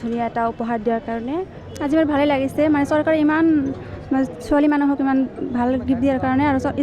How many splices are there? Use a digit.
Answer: 1